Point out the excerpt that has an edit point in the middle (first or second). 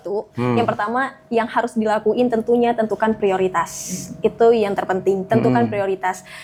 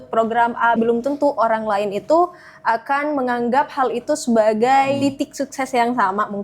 second